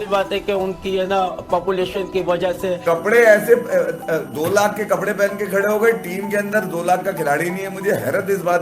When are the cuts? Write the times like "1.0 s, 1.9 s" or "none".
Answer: 2.8 s